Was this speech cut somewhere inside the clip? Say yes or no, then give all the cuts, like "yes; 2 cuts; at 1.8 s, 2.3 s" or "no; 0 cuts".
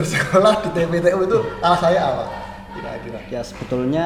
no; 0 cuts